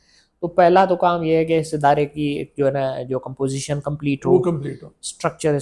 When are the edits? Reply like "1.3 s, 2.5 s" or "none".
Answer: none